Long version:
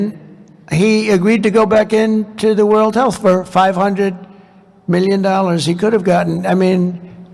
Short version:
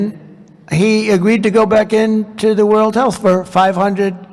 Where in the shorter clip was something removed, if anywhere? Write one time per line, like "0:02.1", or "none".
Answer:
none